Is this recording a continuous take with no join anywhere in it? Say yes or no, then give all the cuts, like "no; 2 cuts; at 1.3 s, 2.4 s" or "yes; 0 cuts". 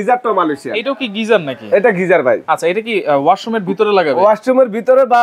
yes; 0 cuts